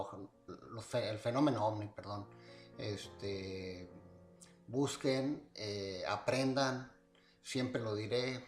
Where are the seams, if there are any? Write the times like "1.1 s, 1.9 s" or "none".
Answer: 7.5 s

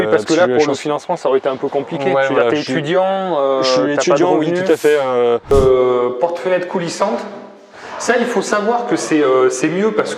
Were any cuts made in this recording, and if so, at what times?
5.5 s

